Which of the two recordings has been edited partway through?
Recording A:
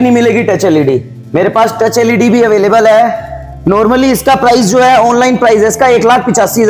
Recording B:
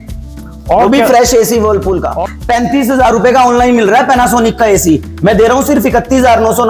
B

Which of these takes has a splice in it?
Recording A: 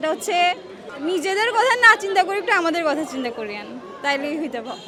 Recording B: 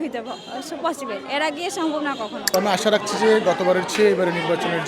B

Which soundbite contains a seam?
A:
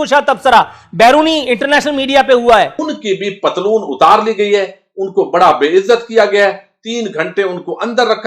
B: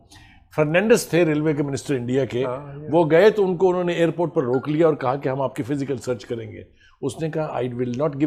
A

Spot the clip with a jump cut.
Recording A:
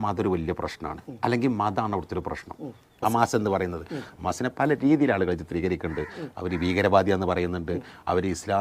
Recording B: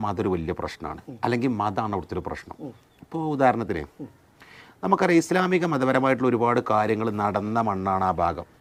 A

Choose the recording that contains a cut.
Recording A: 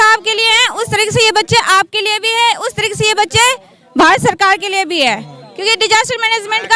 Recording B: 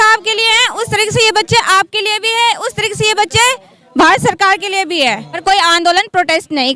B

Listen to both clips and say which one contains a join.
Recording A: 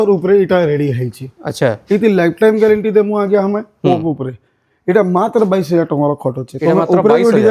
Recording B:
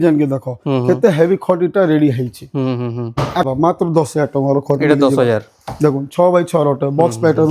B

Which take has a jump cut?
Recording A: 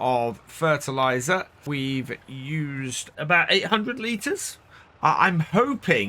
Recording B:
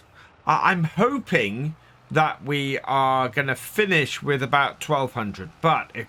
A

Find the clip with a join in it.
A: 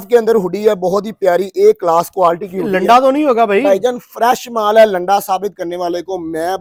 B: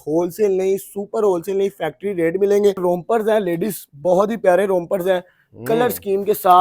B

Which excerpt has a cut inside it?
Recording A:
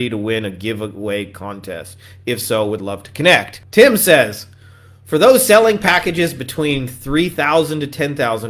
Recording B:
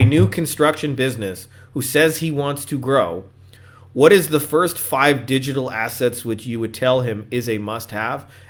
A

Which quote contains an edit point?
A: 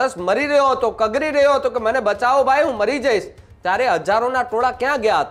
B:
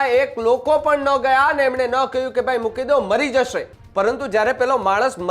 B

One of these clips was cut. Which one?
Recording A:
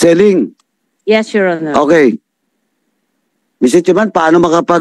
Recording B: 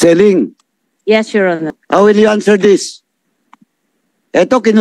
B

